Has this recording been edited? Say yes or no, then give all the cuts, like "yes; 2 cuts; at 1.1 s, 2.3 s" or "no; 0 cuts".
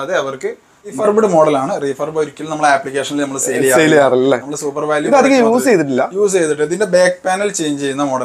yes; 1 cut; at 1.0 s